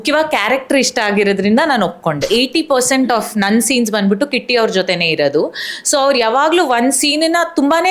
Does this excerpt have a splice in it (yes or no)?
yes